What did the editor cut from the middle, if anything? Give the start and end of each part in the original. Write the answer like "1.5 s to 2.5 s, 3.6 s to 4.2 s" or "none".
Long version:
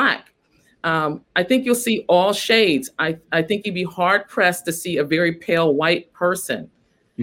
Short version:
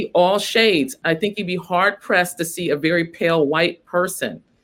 2.9 s to 3.2 s